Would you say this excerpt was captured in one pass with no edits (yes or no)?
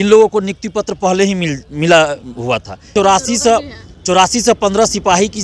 no